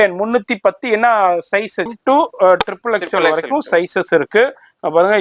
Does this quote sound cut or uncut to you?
cut